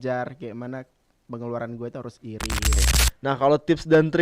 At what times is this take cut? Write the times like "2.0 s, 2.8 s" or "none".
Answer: 2.7 s